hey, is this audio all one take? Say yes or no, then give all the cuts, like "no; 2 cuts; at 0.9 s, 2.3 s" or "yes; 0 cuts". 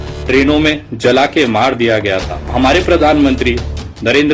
no; 1 cut; at 2.4 s